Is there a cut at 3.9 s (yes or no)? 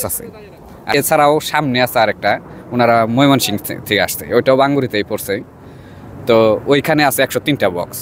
no